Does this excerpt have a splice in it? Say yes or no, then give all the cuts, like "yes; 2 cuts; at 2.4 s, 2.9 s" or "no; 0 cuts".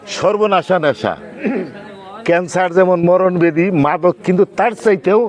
no; 0 cuts